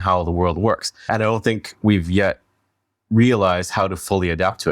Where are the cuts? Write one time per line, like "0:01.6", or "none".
0:01.1